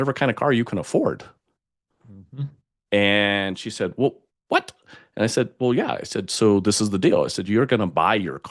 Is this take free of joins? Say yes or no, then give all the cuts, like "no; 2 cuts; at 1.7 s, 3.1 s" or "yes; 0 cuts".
yes; 0 cuts